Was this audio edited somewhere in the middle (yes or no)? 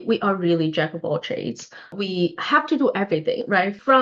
no